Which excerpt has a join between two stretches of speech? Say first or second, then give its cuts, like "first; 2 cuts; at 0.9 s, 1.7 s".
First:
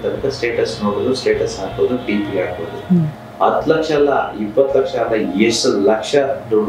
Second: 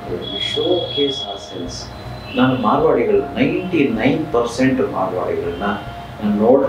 first; 1 cut; at 3.2 s